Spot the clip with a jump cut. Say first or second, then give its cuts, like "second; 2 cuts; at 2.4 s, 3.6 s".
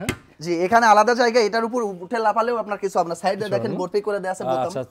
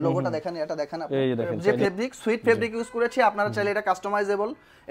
second; 1 cut; at 1.5 s